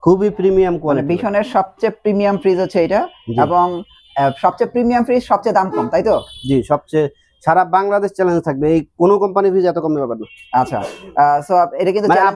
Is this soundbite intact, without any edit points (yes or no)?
yes